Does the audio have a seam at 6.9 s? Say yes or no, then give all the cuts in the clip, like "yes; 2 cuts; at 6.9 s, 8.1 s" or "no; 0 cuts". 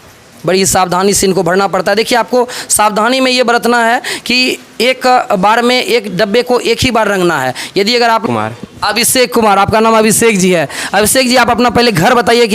no; 1 cut; at 8.2 s